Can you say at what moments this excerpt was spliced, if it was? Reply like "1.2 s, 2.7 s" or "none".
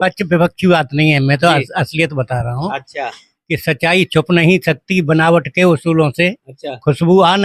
none